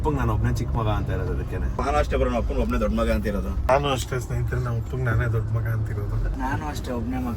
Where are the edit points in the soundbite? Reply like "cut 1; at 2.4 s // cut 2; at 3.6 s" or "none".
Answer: cut 1; at 1.8 s // cut 2; at 3.7 s // cut 3; at 6.3 s